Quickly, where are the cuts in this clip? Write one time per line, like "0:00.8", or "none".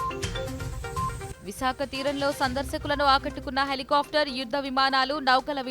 0:00.9

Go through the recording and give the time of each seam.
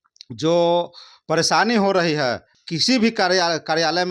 0:02.5

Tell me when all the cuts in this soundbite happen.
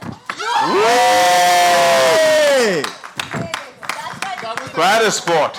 none

